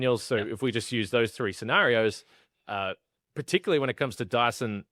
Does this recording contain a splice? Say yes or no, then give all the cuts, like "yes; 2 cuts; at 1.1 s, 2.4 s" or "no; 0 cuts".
no; 0 cuts